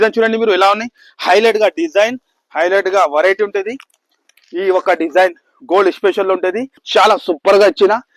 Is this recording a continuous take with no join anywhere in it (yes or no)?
no